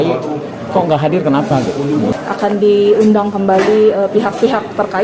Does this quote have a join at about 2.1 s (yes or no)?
yes